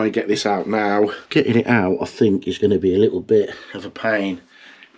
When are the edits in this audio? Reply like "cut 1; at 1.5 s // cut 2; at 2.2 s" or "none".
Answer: none